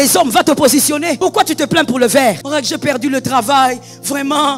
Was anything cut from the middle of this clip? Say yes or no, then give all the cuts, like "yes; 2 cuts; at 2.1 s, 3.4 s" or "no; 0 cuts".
yes; 2 cuts; at 1.1 s, 2.4 s